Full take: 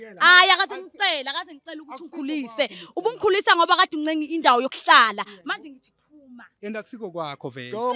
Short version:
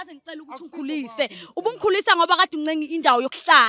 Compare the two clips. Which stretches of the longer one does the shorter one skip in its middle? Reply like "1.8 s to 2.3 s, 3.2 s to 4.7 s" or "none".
none